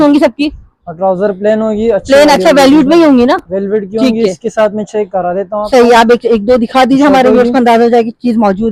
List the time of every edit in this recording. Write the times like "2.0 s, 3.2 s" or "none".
none